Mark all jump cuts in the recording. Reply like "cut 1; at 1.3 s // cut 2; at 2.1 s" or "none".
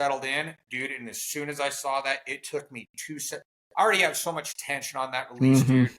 none